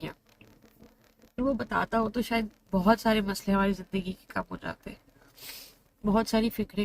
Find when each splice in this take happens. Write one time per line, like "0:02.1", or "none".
0:01.4